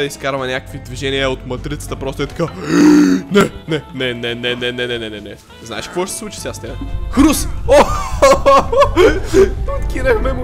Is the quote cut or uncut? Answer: uncut